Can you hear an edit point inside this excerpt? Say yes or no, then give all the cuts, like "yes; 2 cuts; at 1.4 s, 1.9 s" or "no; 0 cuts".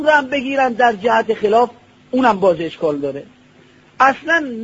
yes; 1 cut; at 2.6 s